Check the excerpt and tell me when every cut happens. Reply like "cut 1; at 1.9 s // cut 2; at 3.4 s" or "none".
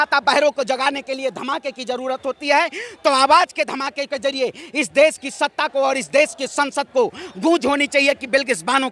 none